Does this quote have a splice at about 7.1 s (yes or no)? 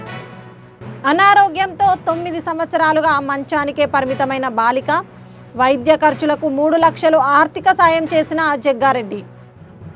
no